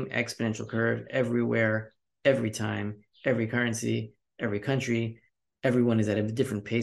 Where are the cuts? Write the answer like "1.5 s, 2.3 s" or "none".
none